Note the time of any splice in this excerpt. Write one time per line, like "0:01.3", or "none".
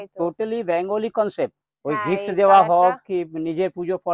0:01.7